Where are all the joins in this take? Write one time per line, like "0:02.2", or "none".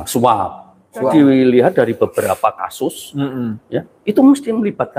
0:01.1